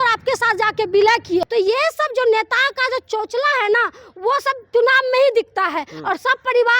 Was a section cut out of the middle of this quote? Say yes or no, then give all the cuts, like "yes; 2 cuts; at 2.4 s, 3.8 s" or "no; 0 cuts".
yes; 1 cut; at 1.5 s